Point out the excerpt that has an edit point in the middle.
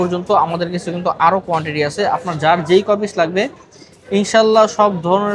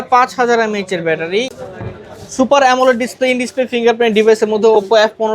second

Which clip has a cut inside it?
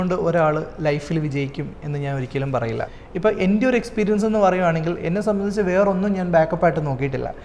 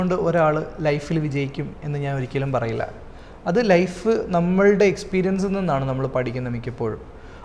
first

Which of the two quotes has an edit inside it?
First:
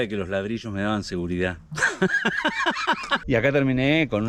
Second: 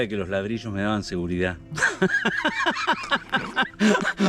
first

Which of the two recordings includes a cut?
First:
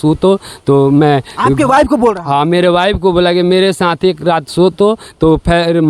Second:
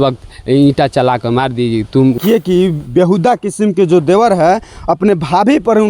second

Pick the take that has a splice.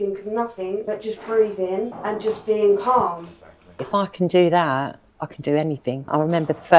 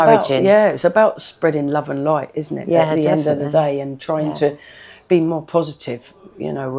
first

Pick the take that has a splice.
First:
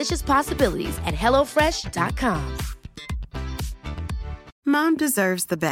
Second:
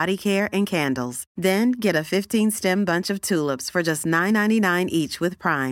first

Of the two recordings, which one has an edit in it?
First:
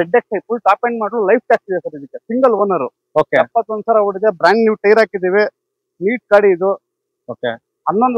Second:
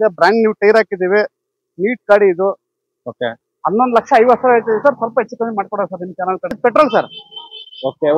second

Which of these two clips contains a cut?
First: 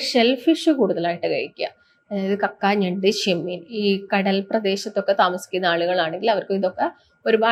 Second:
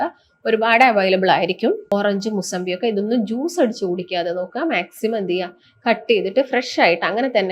second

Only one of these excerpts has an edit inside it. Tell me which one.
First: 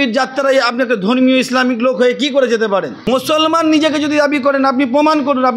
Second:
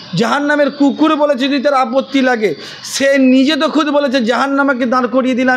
first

